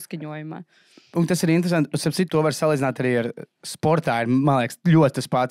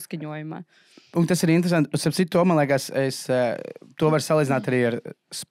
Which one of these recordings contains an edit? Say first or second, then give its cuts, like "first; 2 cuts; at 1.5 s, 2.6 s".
first; 1 cut; at 2.3 s